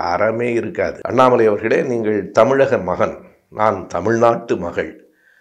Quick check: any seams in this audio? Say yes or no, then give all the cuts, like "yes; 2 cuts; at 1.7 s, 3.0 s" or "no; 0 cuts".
yes; 1 cut; at 1.0 s